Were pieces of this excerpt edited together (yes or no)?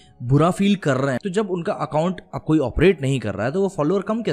yes